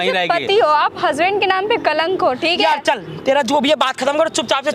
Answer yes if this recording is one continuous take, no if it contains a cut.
yes